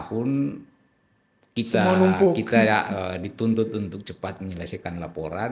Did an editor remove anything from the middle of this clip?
no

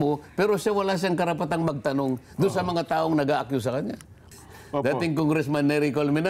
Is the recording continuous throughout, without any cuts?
no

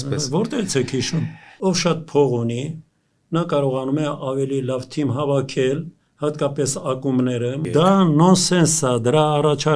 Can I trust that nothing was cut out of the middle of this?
no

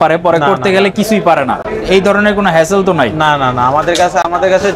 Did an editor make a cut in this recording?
no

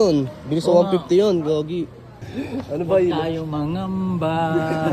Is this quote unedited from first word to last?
no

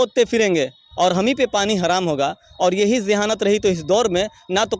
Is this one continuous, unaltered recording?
yes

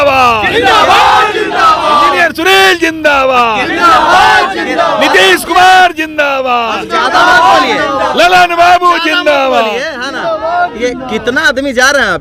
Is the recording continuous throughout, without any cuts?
yes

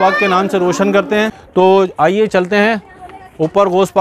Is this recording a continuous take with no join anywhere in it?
no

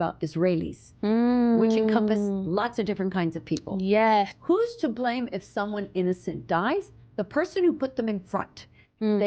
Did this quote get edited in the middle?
yes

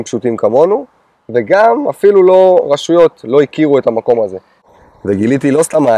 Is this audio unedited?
no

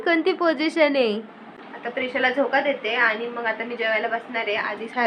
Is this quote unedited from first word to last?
no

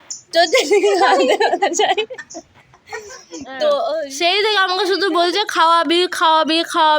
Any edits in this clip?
yes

